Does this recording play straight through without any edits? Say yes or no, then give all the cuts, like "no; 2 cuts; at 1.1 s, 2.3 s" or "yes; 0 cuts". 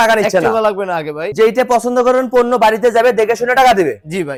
yes; 0 cuts